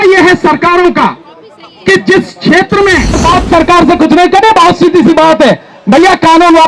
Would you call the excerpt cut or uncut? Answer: cut